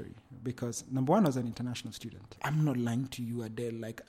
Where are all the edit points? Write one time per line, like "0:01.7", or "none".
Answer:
0:02.3